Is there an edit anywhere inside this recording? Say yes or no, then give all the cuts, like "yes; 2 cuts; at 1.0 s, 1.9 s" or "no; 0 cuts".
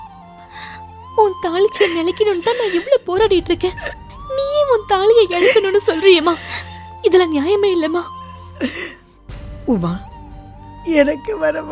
no; 0 cuts